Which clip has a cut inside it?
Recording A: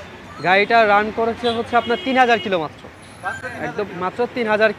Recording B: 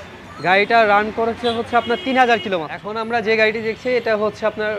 B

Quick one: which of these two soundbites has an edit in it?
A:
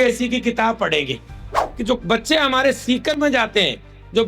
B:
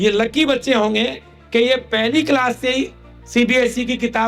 A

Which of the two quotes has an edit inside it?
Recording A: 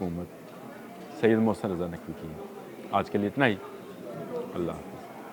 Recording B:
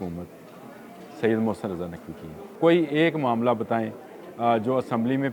B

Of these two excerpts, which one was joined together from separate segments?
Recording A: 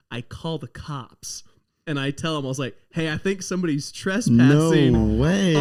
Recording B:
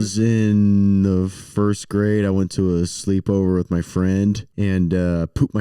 B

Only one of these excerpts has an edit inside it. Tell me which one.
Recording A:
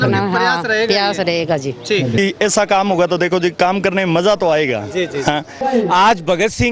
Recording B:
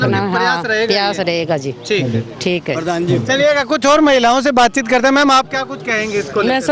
A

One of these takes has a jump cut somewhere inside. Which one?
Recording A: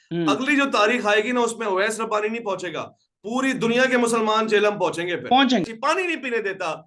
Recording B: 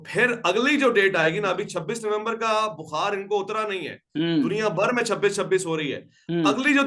A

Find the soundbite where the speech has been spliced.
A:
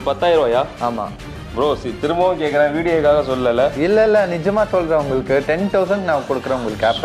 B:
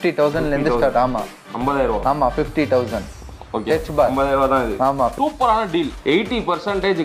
B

